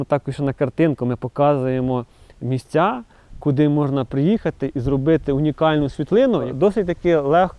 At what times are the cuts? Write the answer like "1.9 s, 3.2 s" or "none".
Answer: 6.5 s